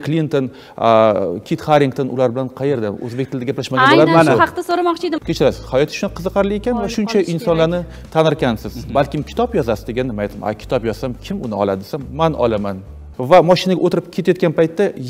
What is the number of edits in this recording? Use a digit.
2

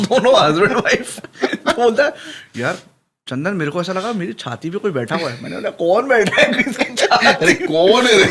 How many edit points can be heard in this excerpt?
0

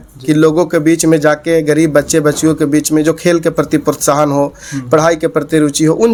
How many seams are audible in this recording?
0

